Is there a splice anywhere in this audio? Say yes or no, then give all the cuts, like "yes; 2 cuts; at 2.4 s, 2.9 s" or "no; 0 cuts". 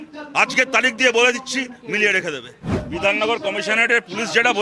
no; 0 cuts